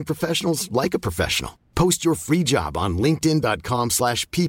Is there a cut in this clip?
no; 0 cuts

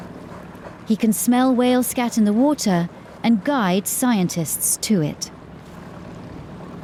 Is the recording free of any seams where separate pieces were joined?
yes; 0 cuts

